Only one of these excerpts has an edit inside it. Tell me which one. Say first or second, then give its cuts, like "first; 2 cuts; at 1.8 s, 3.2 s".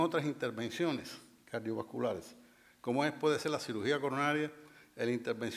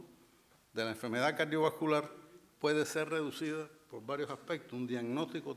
second; 1 cut; at 3.0 s